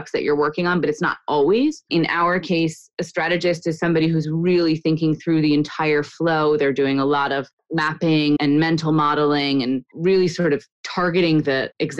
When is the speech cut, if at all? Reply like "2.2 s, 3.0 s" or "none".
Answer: 1.8 s